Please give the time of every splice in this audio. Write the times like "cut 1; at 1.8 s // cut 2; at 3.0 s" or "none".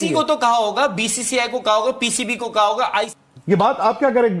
cut 1; at 3.2 s